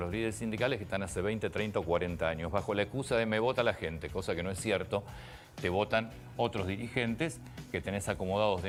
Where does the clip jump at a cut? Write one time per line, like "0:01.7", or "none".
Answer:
none

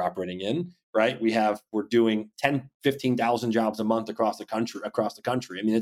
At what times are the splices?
none

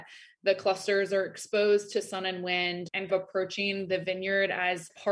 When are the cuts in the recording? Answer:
0:03.1

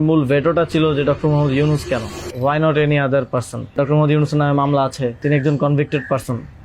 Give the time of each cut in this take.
0:02.2
0:03.7
0:05.2

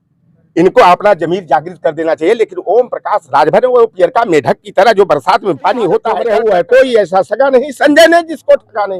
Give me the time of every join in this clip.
0:06.1

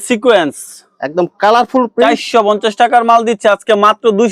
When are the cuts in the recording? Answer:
none

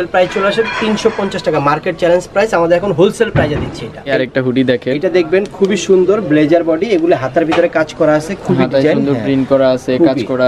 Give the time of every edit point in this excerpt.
0:04.1

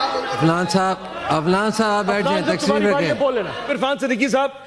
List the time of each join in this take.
0:03.7

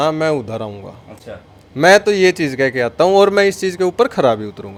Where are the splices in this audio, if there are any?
none

